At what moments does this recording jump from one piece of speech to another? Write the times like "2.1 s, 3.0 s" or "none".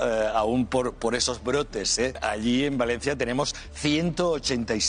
2.2 s